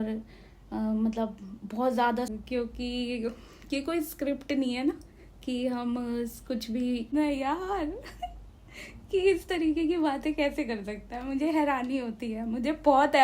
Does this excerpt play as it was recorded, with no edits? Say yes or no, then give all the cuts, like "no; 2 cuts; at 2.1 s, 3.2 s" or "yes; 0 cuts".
no; 2 cuts; at 2.3 s, 7.1 s